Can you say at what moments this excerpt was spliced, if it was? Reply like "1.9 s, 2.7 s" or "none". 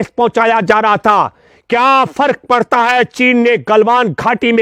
none

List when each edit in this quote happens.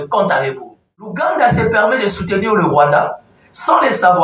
1.1 s

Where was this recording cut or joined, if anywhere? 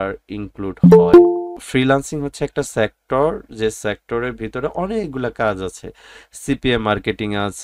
1.6 s

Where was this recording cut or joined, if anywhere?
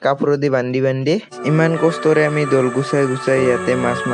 1.4 s

